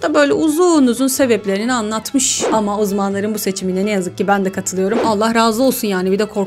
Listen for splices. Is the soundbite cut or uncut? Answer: cut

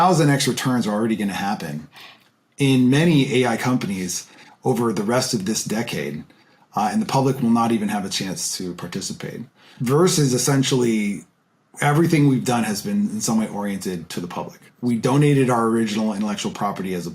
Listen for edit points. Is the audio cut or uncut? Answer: cut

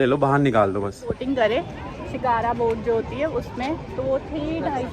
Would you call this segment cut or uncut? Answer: cut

